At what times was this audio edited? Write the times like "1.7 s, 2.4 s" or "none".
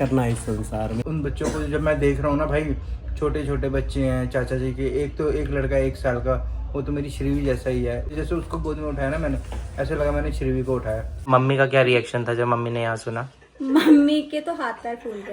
1.0 s, 8.2 s, 11.1 s